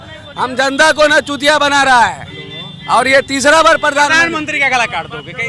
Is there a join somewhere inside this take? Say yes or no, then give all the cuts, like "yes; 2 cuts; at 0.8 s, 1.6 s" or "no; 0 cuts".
no; 0 cuts